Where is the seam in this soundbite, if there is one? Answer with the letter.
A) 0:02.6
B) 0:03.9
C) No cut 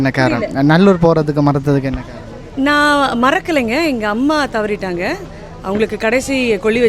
C